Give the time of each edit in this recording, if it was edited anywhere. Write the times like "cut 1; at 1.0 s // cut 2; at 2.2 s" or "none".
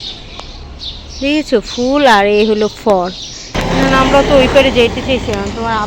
cut 1; at 3.5 s